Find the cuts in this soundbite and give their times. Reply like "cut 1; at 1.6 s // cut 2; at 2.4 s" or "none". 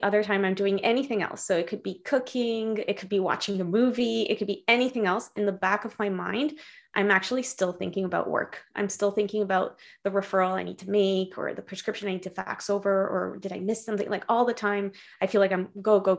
none